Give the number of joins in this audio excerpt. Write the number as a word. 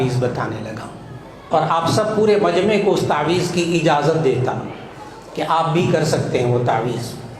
one